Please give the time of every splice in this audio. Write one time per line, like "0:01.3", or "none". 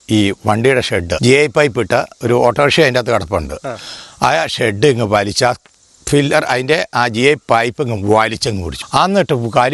0:01.1
0:08.7